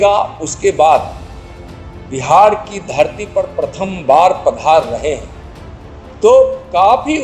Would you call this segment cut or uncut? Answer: uncut